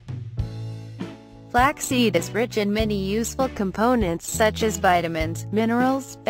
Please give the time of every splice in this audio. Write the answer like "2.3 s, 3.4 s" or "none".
none